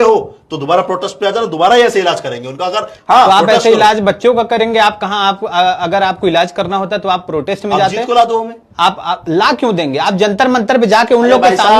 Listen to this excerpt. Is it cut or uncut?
uncut